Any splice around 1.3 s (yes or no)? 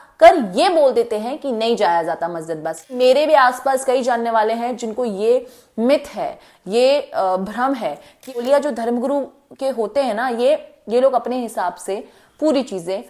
no